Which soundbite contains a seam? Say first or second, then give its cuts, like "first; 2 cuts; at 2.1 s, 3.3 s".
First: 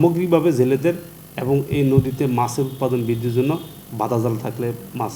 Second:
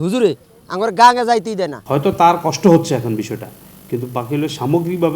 second; 1 cut; at 1.7 s